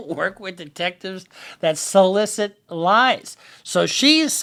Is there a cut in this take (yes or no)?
no